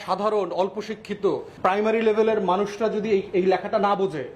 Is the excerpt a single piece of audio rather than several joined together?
no; 1 cut; at 1.5 s

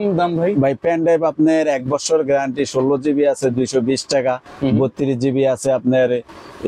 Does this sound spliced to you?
no; 0 cuts

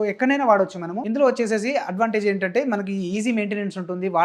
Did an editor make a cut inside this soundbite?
yes; 1 cut; at 0.9 s

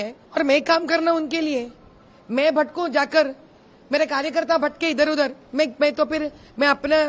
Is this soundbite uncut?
yes; 0 cuts

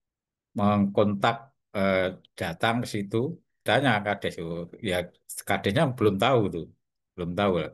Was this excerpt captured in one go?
no; 1 cut; at 3.5 s

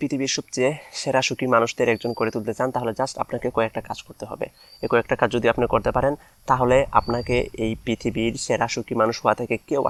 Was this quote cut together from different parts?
no; 0 cuts

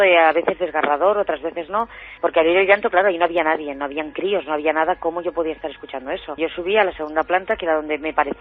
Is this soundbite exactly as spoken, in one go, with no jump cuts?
yes; 0 cuts

